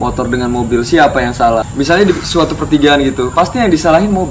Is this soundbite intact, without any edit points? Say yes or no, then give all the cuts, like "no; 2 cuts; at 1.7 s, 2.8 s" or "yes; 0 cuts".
yes; 0 cuts